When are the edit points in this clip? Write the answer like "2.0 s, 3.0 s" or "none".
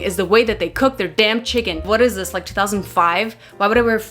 1.8 s